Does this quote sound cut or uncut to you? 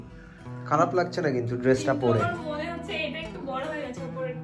uncut